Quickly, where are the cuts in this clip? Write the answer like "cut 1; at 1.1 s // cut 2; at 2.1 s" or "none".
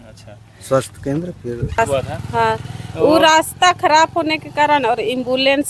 cut 1; at 1.8 s

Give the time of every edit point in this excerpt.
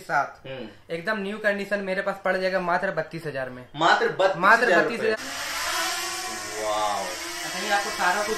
cut 1; at 5.1 s

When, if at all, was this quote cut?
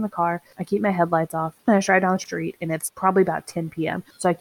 cut 1; at 2.2 s

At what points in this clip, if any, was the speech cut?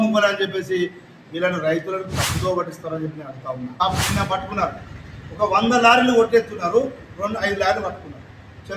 cut 1; at 3.8 s

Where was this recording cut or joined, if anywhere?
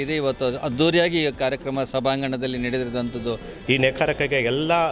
cut 1; at 3.5 s

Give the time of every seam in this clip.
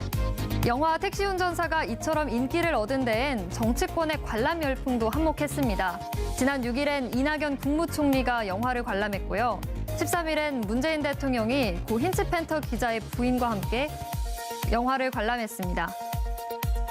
cut 1; at 14.1 s

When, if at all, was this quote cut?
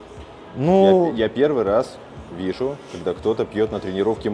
none

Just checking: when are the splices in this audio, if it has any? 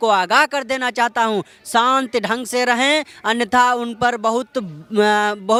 none

